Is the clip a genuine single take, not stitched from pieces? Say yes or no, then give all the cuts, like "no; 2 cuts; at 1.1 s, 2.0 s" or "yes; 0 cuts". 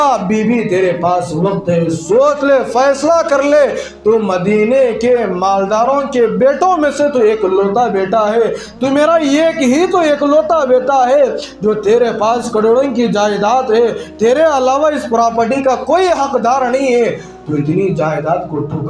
yes; 0 cuts